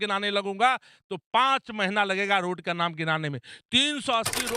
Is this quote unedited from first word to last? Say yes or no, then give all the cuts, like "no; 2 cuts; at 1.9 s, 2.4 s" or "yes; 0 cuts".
yes; 0 cuts